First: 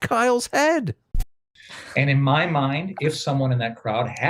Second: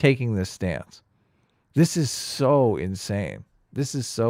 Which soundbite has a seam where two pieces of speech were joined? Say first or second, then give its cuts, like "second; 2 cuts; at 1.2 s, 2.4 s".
first; 1 cut; at 1.3 s